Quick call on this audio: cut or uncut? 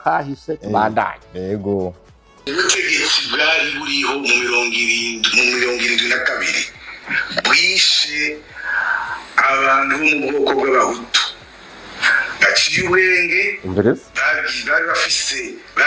cut